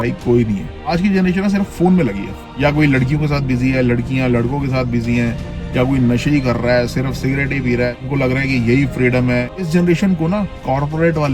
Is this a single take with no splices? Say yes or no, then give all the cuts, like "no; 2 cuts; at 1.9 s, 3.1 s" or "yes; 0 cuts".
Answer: no; 4 cuts; at 0.9 s, 2.4 s, 8.0 s, 9.7 s